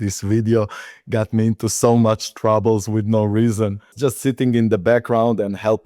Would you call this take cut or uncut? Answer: cut